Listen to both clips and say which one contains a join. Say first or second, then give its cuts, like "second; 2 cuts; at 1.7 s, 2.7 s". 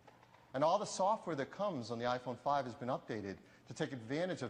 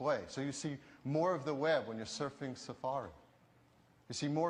first; 1 cut; at 2.4 s